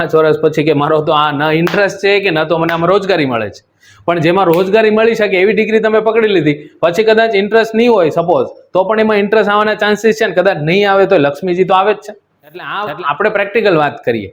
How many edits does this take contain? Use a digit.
1